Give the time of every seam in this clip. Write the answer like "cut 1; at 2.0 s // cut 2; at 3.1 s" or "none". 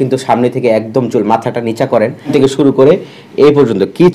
cut 1; at 2.3 s